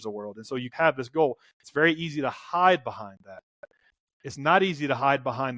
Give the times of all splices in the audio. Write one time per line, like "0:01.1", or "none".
none

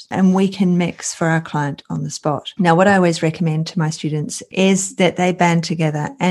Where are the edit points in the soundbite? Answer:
0:04.5

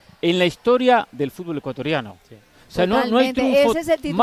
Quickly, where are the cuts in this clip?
none

